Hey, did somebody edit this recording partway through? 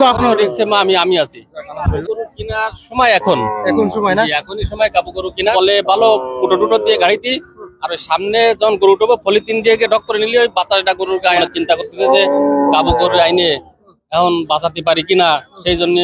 yes; 3 cuts; at 2.0 s, 5.5 s, 11.4 s

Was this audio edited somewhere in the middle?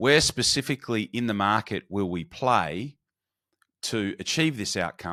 no; 0 cuts

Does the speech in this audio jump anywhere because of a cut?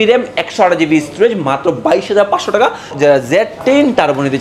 yes; 1 cut; at 2.9 s

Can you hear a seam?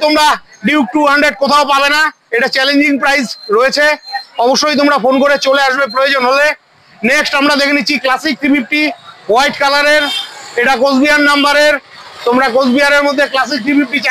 no; 0 cuts

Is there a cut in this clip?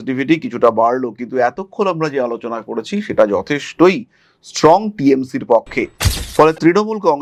no; 0 cuts

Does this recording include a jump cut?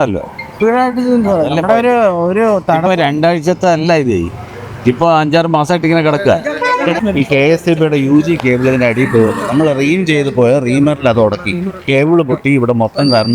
yes; 1 cut; at 6.9 s

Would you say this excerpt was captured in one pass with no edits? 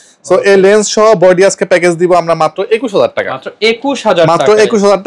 yes; 0 cuts

